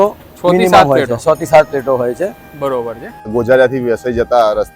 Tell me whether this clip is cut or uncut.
cut